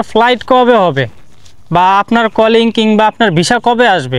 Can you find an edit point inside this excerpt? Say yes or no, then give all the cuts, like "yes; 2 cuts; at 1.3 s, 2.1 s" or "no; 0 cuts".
no; 0 cuts